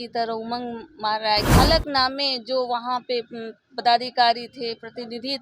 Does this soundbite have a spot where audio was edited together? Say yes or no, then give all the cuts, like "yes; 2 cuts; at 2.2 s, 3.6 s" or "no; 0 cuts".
yes; 1 cut; at 1.5 s